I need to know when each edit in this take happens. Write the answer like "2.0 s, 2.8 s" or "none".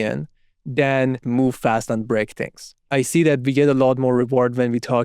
1.2 s, 2.8 s